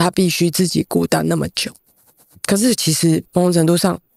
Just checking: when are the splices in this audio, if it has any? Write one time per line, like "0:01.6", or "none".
0:02.4